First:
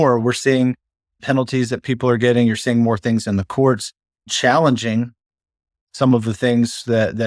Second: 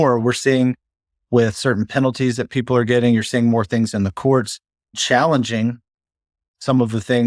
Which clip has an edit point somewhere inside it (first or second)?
first